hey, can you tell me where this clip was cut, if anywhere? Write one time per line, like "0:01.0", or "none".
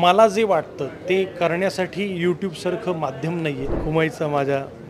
0:03.8

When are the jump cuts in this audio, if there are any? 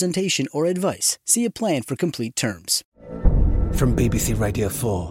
0:02.8

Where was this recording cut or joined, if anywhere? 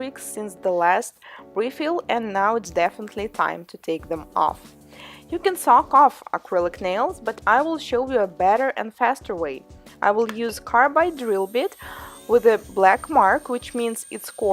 none

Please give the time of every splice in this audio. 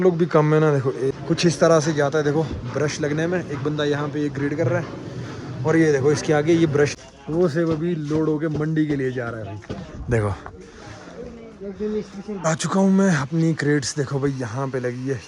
0:01.2
0:06.9
0:12.5

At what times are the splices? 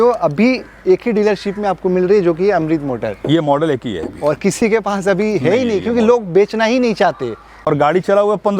0:07.5

